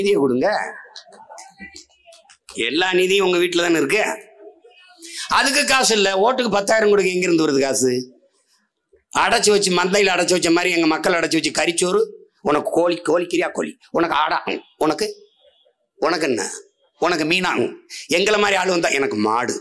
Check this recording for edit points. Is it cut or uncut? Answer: uncut